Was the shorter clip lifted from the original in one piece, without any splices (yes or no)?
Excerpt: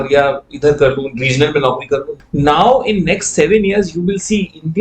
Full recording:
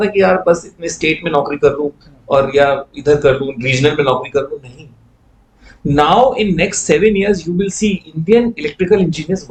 no